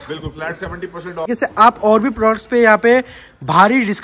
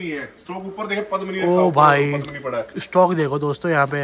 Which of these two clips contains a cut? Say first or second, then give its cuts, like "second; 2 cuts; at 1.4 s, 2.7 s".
first; 1 cut; at 1.3 s